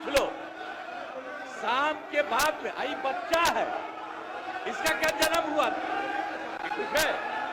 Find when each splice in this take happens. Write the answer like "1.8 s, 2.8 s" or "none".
none